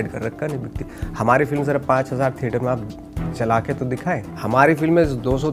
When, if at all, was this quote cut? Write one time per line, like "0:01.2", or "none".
0:04.3